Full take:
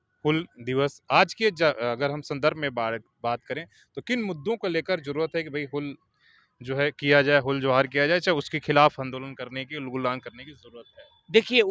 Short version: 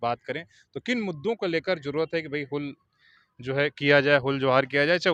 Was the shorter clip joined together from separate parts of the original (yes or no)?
no